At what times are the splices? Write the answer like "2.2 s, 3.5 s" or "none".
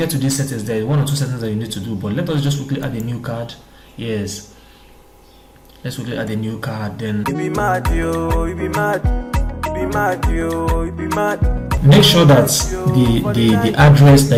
none